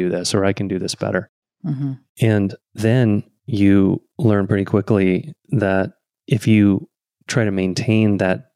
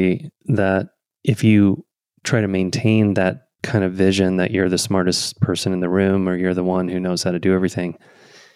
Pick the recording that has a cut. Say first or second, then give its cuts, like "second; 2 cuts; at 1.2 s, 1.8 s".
first; 1 cut; at 1.9 s